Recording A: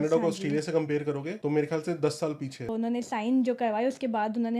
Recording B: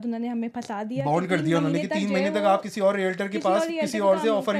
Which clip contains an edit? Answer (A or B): A